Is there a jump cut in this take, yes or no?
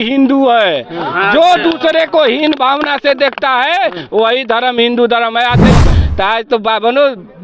yes